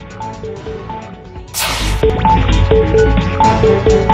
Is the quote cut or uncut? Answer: cut